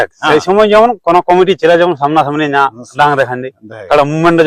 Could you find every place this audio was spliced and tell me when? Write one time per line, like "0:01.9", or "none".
none